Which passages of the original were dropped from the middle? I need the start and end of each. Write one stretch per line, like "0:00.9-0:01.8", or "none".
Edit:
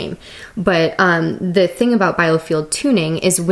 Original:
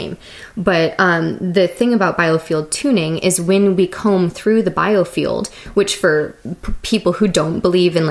none